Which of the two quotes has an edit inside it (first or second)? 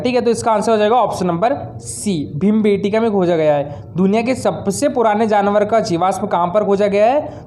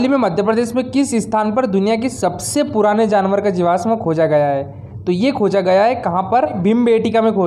second